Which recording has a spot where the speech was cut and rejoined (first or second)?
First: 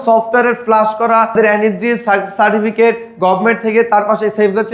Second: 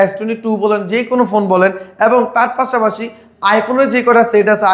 first